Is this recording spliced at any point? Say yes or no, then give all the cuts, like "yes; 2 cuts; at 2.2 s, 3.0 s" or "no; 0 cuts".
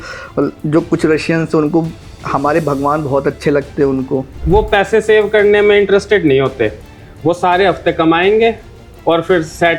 yes; 1 cut; at 4.4 s